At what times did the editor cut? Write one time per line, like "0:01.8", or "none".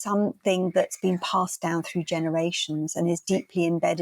none